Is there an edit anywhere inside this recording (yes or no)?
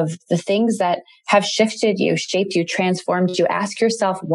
no